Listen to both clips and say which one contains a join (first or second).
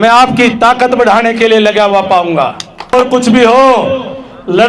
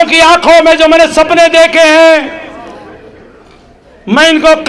first